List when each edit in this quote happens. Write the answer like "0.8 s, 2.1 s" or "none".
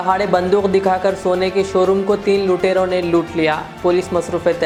none